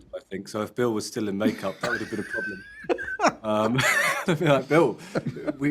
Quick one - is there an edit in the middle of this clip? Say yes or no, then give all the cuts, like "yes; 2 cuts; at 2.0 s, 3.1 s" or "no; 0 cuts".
no; 0 cuts